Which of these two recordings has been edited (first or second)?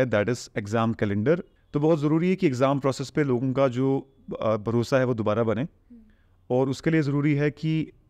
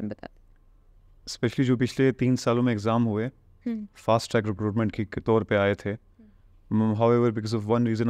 first